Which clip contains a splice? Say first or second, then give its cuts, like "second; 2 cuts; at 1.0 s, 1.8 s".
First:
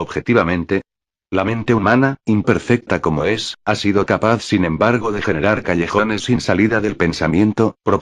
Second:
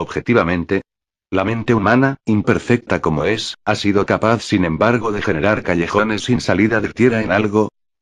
first; 1 cut; at 6.8 s